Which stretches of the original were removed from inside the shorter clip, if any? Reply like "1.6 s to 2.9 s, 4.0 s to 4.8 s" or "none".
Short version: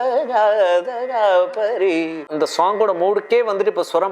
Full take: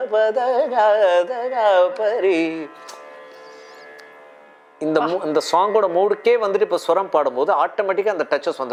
2.7 s to 5.2 s